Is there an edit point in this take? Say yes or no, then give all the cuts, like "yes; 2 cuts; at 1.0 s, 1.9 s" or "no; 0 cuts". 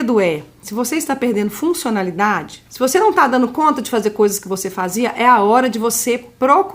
yes; 1 cut; at 2.6 s